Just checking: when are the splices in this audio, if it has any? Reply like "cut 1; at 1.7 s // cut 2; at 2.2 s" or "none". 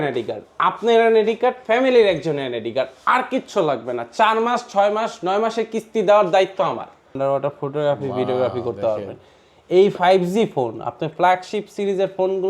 cut 1; at 7.1 s

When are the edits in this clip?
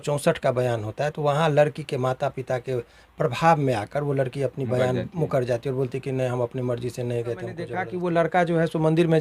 cut 1; at 7.8 s

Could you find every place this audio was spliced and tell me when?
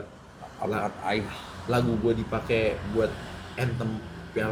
none

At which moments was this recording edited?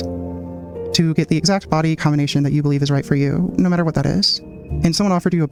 none

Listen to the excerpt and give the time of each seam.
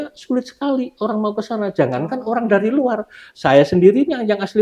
none

